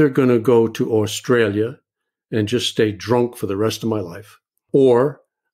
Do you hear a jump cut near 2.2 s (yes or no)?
no